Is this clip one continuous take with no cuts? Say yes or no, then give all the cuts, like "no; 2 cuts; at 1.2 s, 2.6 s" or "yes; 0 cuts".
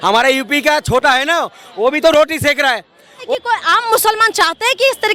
no; 1 cut; at 3.3 s